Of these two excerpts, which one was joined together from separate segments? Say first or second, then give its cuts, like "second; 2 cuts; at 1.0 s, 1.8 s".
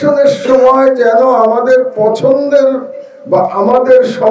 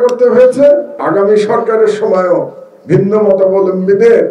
second; 1 cut; at 1.0 s